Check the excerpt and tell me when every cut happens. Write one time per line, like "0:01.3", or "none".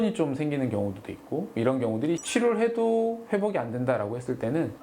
0:02.2